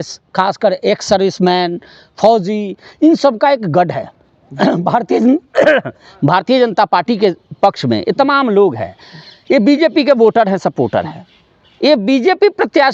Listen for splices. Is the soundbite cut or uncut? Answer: uncut